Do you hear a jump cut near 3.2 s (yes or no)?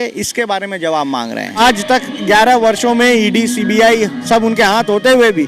no